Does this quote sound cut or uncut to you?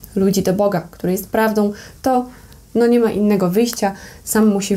uncut